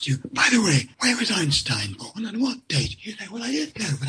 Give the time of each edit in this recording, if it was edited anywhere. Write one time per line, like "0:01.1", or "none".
0:00.9